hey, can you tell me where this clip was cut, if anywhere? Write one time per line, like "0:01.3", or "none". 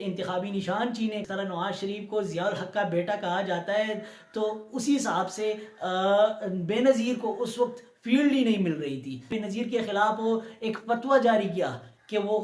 0:01.3
0:09.3